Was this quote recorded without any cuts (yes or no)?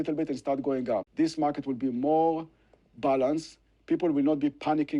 no